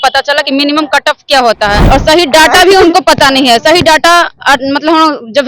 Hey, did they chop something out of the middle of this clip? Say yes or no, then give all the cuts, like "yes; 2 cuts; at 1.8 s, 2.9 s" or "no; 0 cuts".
yes; 1 cut; at 1.8 s